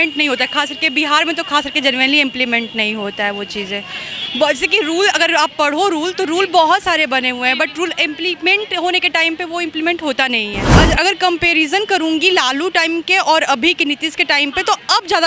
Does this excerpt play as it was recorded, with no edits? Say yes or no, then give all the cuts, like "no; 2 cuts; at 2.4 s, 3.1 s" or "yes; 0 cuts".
no; 1 cut; at 10.7 s